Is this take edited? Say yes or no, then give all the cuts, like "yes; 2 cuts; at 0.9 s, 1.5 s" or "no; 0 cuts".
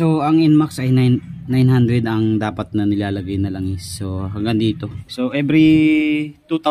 yes; 1 cut; at 5.0 s